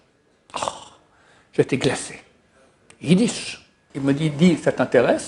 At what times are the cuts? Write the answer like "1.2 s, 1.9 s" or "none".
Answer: 3.9 s